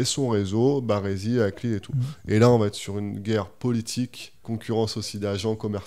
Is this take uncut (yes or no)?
no